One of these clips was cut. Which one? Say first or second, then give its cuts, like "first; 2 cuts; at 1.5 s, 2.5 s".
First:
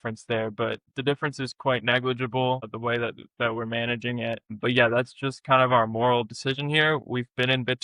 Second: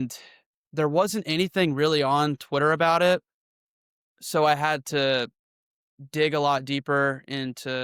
first; 3 cuts; at 0.9 s, 2.7 s, 4.6 s